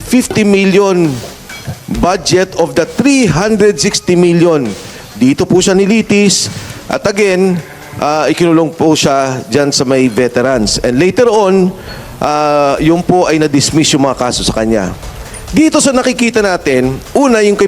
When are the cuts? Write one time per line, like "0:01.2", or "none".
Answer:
0:05.0